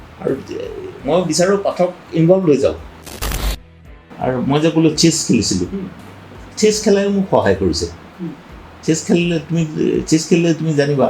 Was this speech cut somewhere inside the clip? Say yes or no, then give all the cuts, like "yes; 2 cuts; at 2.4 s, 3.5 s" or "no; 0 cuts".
yes; 1 cut; at 3.5 s